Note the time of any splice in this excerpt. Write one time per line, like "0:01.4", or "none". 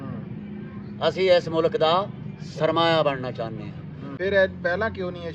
0:04.0

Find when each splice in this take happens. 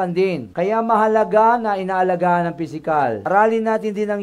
0:03.2

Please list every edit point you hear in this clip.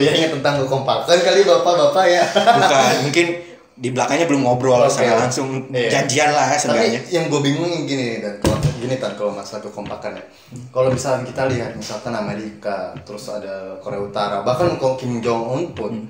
none

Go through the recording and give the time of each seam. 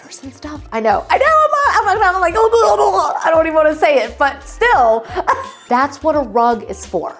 0:05.5

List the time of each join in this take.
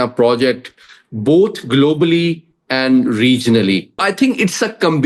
0:04.0

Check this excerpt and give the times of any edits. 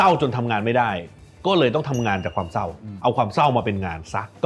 none

